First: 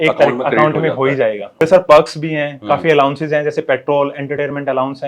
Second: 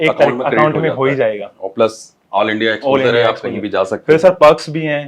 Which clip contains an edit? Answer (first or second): first